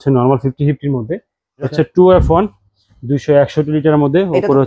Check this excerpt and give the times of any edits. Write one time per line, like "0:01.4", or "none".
0:01.7